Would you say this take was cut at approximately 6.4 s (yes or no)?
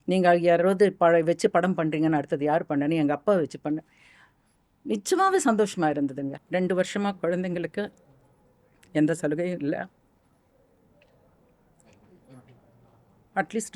yes